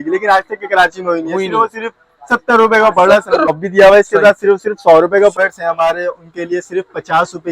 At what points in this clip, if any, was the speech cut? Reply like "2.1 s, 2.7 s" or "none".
3.5 s, 5.3 s